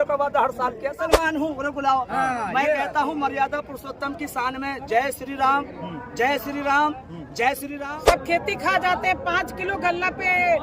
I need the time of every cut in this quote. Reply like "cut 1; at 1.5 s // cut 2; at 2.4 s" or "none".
cut 1; at 0.9 s // cut 2; at 7.7 s